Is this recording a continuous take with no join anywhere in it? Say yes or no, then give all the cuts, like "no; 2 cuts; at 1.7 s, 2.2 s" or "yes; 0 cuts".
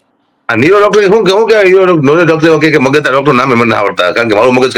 yes; 0 cuts